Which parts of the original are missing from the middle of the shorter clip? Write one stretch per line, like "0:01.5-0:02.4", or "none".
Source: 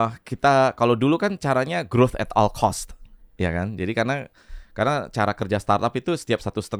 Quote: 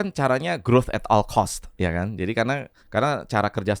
0:02.9-0:03.2
0:04.3-0:04.6